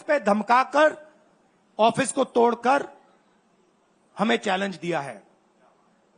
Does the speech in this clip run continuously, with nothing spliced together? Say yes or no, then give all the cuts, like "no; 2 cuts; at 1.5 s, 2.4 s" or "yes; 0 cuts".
yes; 0 cuts